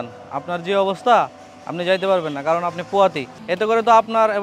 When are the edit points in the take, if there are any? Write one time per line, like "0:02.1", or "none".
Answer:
0:03.3